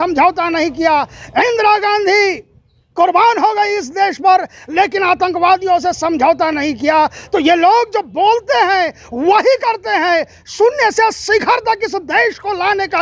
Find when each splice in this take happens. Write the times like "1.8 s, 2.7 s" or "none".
none